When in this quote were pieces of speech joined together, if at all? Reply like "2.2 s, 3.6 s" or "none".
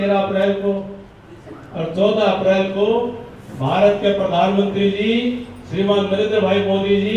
none